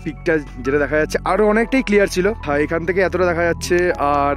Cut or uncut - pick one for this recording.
cut